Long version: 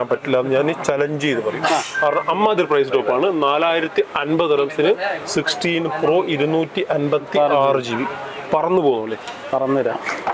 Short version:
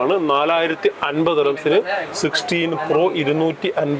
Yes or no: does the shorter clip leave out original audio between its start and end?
no